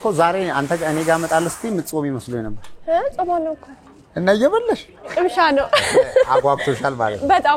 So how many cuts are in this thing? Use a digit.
1